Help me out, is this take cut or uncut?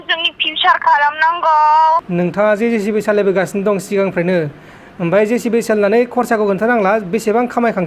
cut